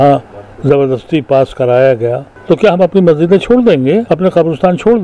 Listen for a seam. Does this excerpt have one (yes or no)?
yes